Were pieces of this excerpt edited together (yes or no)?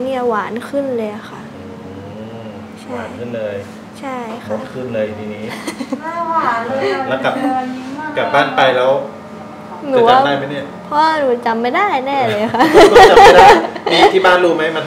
no